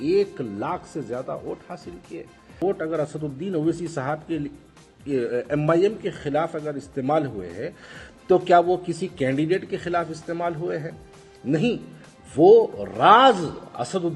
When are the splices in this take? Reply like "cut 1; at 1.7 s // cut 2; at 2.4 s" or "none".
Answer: cut 1; at 2.6 s